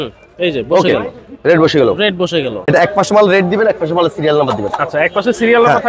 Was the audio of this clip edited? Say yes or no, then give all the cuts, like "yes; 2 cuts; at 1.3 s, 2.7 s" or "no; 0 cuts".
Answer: yes; 1 cut; at 2.6 s